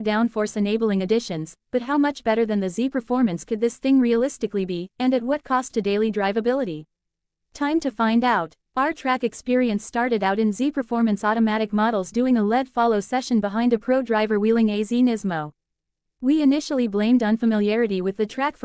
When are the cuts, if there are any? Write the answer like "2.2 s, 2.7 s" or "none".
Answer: 7.3 s